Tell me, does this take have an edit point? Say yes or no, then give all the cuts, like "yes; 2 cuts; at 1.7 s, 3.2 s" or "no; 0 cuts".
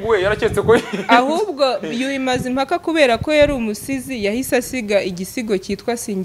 no; 0 cuts